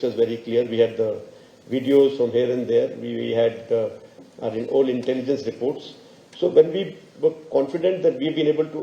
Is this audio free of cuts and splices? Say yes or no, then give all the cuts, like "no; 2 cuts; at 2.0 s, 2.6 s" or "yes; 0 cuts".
yes; 0 cuts